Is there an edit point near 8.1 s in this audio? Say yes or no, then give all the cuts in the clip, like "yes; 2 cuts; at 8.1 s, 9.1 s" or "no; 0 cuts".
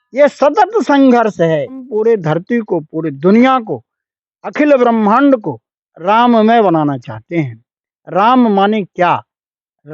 no; 1 cut; at 1.9 s